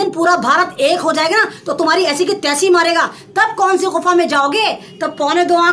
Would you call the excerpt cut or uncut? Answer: uncut